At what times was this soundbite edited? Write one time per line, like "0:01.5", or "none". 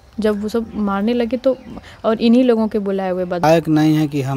0:03.4